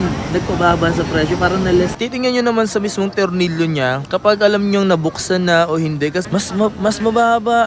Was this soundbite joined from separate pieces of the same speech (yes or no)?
yes